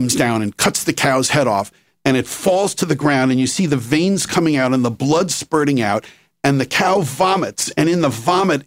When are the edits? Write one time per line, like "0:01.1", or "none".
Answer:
none